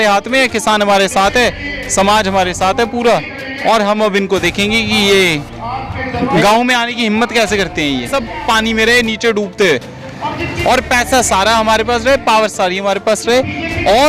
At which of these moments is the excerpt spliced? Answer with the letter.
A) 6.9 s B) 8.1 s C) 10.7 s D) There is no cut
B